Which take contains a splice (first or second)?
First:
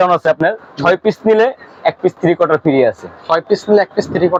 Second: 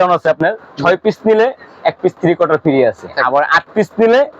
second